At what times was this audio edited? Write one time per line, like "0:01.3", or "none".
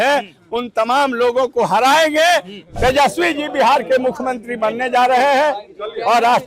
0:02.6